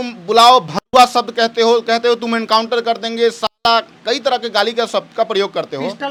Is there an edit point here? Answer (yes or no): no